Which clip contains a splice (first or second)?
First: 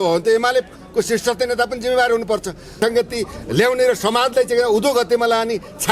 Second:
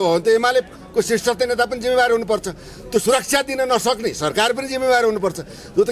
first